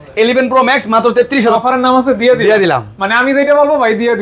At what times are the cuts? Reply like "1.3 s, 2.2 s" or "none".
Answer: 1.5 s